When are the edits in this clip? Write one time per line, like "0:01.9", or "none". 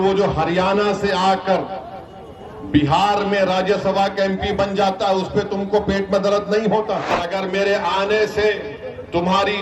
0:07.2